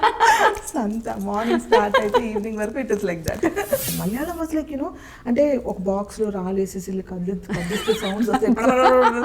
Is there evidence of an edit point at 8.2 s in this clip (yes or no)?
no